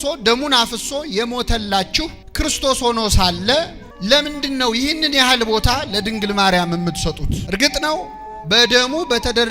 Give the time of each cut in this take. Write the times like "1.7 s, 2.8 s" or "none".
2.2 s, 3.8 s, 7.3 s